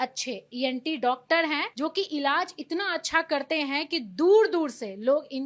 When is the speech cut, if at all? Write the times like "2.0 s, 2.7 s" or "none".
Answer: 1.7 s